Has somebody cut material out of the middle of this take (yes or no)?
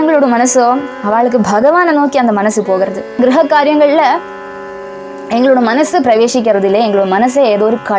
yes